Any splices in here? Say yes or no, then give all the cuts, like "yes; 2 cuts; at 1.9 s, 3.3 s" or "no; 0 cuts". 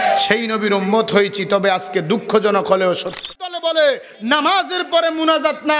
yes; 1 cut; at 3.2 s